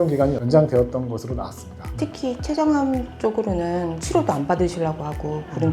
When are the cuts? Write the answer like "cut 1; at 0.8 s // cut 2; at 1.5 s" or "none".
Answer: cut 1; at 1.9 s // cut 2; at 4.0 s

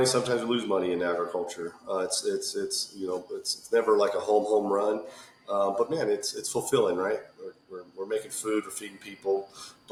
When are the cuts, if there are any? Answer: none

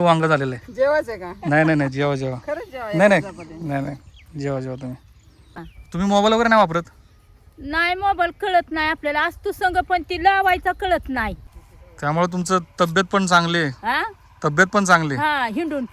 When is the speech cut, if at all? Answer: cut 1; at 5.7 s // cut 2; at 11.4 s

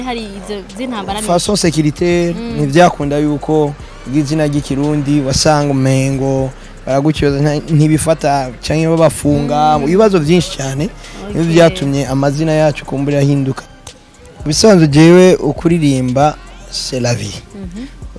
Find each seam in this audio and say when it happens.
cut 1; at 13.7 s

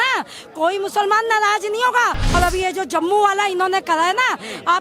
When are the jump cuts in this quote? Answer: cut 1; at 2.2 s

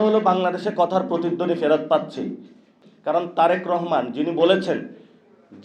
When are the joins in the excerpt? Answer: cut 1; at 2.8 s

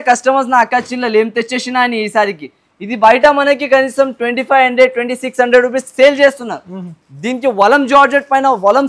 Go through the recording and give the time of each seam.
none

